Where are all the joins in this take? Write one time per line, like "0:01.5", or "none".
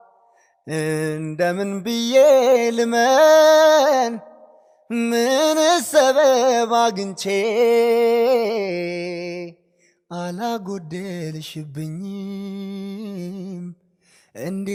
none